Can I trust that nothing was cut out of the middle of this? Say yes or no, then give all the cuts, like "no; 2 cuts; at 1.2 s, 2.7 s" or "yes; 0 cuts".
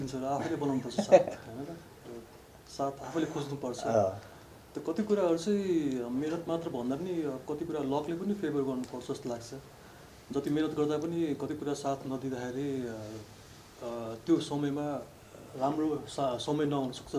yes; 0 cuts